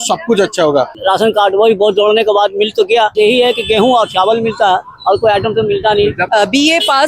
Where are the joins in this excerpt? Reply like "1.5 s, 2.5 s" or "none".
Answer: 1.0 s, 3.1 s, 6.2 s

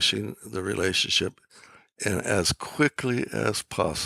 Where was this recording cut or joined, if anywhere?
none

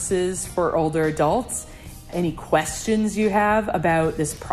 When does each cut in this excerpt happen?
2.1 s

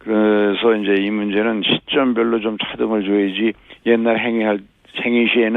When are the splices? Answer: 2.9 s

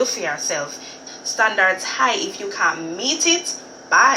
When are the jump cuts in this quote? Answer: 0.9 s

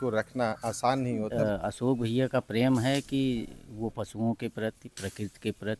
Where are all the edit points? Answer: 1.3 s

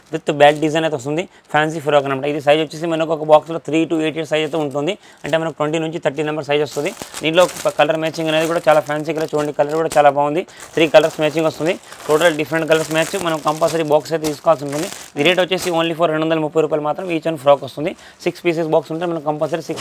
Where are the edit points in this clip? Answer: none

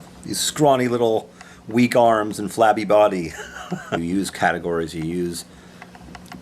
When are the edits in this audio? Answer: none

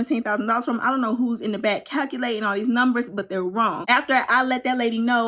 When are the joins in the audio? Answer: 3.8 s

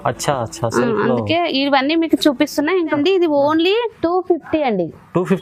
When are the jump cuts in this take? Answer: 3.0 s

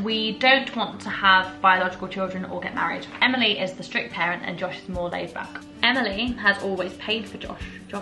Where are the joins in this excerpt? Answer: 3.1 s, 5.6 s

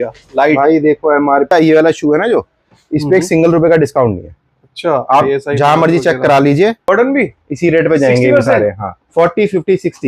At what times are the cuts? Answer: 1.5 s, 6.9 s

